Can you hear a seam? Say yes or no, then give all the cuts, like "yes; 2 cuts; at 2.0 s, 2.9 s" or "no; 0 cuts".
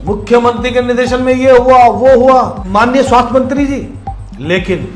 yes; 1 cut; at 2.6 s